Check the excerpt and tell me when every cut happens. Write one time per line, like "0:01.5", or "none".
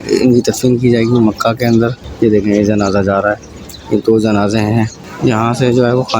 0:02.0
0:05.0